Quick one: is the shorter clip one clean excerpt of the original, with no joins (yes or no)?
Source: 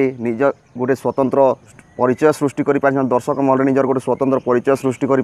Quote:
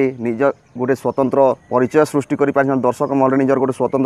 no